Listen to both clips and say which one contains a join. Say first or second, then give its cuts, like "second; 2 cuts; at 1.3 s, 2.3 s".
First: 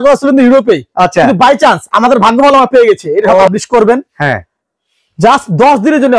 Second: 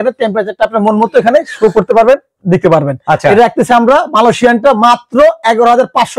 first; 1 cut; at 3.5 s